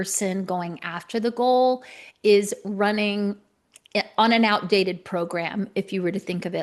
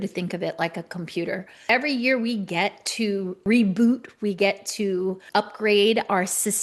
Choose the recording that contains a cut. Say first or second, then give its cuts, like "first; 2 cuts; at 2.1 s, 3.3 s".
second; 3 cuts; at 1.6 s, 3.4 s, 5.2 s